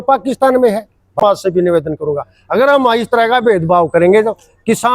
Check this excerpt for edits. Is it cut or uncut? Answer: cut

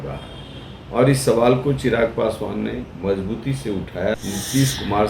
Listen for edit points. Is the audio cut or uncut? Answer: cut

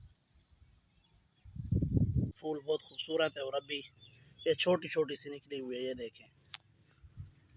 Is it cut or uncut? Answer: cut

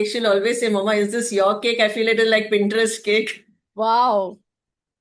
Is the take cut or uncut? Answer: uncut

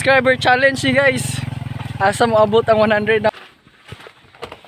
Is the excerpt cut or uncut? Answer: cut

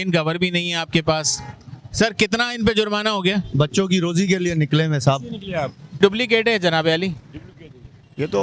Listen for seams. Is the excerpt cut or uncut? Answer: cut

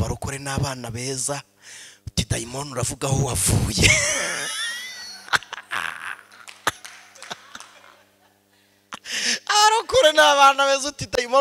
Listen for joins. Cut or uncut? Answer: uncut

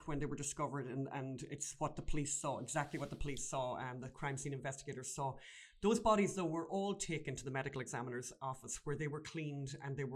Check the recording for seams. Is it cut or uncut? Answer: uncut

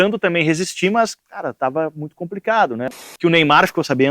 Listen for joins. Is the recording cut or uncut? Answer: cut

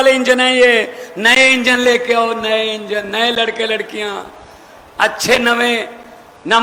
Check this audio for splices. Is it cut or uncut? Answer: uncut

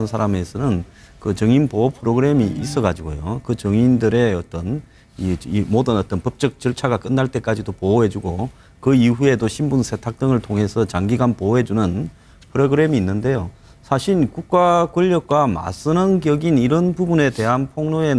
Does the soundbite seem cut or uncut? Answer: uncut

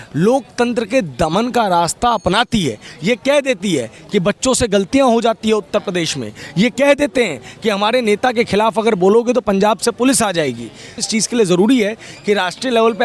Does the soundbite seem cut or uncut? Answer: cut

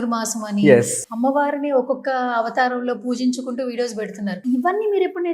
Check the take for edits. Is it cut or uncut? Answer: cut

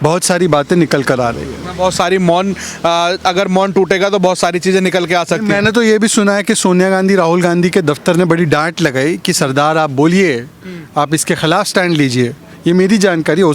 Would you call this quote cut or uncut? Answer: uncut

